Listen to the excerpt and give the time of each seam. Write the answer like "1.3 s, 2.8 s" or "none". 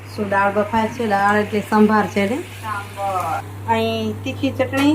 3.5 s

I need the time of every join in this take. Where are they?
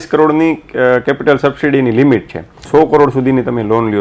2.7 s

